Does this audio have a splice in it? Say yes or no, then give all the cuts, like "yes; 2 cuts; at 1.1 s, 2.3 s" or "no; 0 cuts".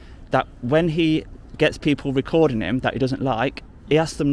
no; 0 cuts